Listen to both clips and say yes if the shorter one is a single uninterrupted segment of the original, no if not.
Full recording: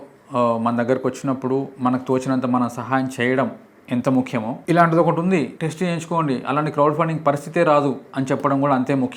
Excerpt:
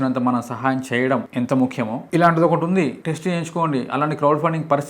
no